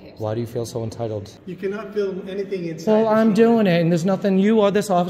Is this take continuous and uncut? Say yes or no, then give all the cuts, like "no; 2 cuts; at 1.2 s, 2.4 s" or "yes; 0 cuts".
no; 1 cut; at 1.4 s